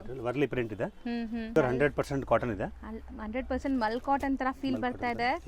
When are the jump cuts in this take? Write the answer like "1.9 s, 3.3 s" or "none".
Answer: 1.6 s